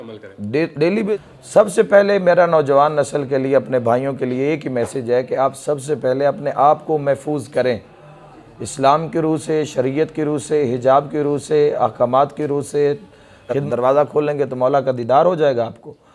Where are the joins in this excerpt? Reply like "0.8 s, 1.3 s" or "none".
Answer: 1.1 s, 13.6 s